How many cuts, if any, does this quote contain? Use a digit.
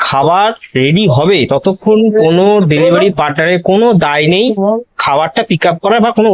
0